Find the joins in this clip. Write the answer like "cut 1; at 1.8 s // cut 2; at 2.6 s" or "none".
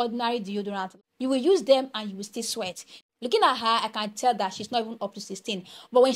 cut 1; at 0.9 s // cut 2; at 2.9 s